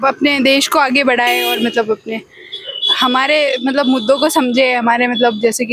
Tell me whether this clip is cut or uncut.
uncut